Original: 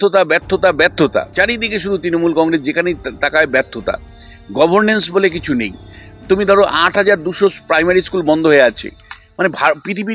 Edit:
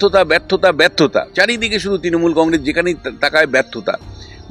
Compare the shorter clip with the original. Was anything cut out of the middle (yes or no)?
no